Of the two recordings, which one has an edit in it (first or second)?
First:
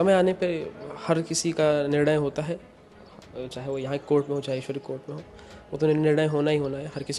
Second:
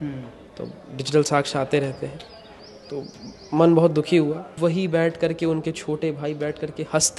second